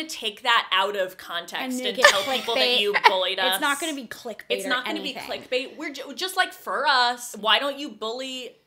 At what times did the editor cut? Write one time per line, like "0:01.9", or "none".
0:07.3